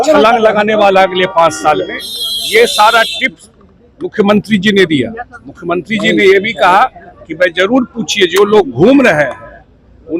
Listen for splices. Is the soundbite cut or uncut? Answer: uncut